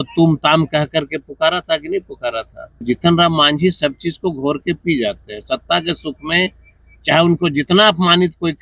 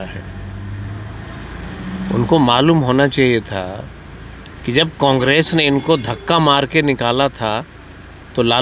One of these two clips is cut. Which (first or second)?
first